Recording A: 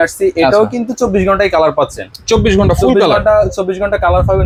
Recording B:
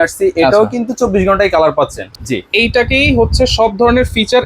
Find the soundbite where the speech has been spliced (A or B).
B